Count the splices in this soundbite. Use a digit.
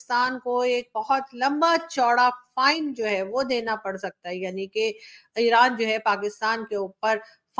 0